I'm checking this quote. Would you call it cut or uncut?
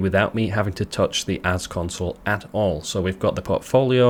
uncut